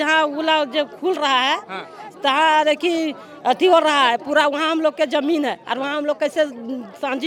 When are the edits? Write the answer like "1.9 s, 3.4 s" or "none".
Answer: none